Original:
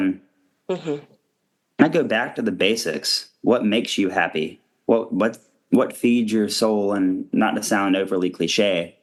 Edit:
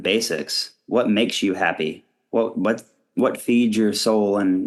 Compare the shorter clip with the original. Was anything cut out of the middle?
no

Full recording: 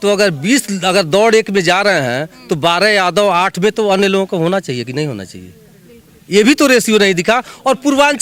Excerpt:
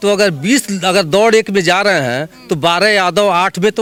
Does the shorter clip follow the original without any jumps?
yes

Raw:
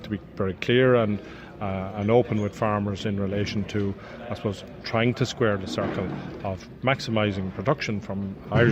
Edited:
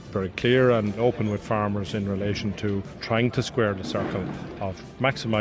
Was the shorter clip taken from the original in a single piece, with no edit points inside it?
no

